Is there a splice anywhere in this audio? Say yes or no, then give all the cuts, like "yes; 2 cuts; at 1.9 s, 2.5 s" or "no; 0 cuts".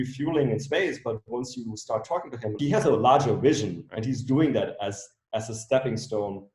yes; 1 cut; at 2.5 s